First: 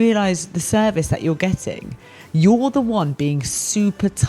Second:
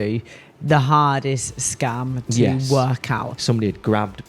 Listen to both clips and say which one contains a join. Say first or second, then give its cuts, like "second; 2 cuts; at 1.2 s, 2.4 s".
second; 1 cut; at 3.3 s